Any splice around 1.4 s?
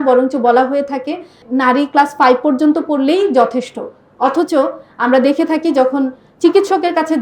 yes; 1 cut; at 1.4 s

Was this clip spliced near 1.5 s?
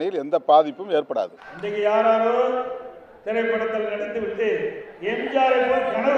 yes; 1 cut; at 1.5 s

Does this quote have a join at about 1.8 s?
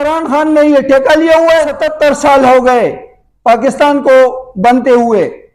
yes; 1 cut; at 1.8 s

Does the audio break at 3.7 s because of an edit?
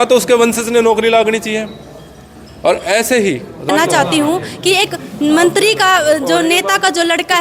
yes; 1 cut; at 3.7 s

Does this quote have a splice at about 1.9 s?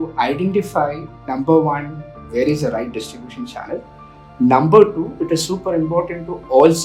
no; 0 cuts

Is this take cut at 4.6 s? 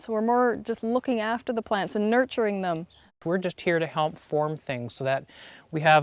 no; 1 cut; at 3.1 s

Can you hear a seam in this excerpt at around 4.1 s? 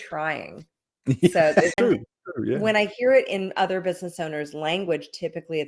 no; 1 cut; at 1.8 s

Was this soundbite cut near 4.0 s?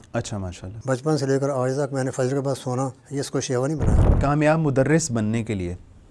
yes; 1 cut; at 4.0 s

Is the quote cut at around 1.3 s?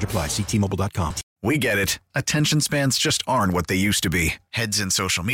yes; 1 cut; at 1.3 s

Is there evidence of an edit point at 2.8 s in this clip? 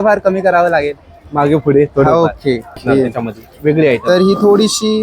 yes; 1 cut; at 2.8 s

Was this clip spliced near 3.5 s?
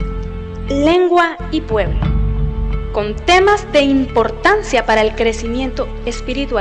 yes; 1 cut; at 3.5 s

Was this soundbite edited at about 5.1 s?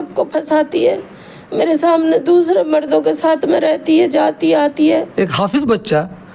yes; 1 cut; at 5.1 s

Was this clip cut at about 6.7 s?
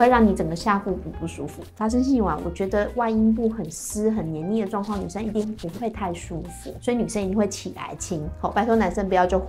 yes; 2 cuts; at 1.6 s, 6.7 s

